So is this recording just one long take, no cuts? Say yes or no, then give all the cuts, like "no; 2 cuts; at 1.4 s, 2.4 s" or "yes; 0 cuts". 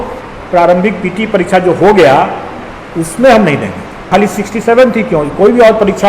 no; 1 cut; at 4.1 s